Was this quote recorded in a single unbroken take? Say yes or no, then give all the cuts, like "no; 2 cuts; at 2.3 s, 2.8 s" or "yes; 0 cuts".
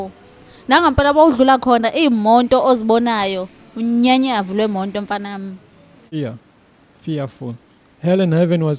no; 1 cut; at 6.1 s